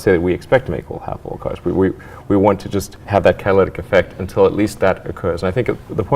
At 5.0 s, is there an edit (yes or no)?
no